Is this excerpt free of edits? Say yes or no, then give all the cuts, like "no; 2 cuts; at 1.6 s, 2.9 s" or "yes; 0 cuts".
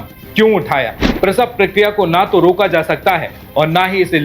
no; 1 cut; at 1.1 s